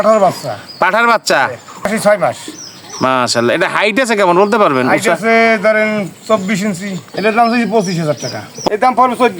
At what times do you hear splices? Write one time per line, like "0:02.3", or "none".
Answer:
0:01.9
0:07.1
0:08.5